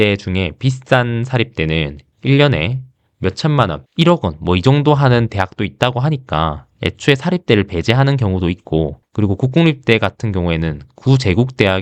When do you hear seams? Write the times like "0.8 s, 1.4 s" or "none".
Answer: none